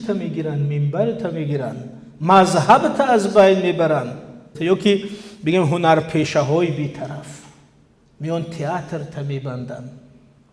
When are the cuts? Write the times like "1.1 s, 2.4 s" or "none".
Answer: 4.5 s